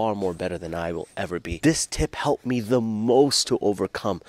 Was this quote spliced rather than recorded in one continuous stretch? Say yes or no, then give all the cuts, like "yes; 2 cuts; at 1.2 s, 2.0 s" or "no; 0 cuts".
yes; 1 cut; at 1.5 s